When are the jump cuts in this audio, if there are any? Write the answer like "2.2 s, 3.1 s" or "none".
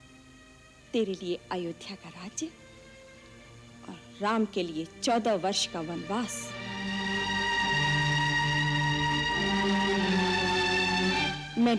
none